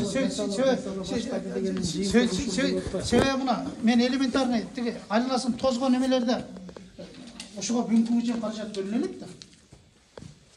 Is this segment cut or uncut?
uncut